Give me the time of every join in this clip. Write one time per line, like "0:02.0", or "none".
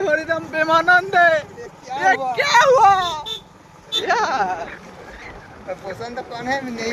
0:03.9